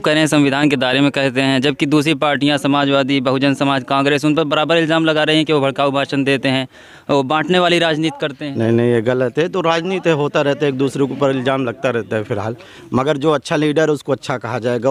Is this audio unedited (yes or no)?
yes